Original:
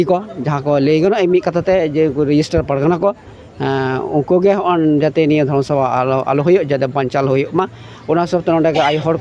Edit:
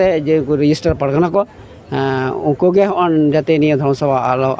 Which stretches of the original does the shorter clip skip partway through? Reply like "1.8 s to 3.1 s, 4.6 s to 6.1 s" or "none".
none